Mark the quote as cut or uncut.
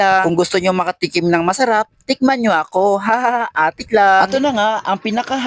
cut